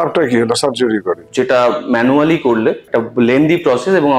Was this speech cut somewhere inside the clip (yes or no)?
yes